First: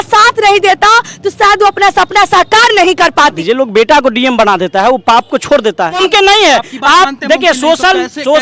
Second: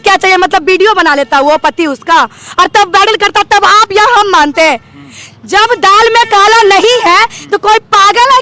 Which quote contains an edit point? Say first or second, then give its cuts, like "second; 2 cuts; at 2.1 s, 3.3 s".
first; 2 cuts; at 3.4 s, 6.0 s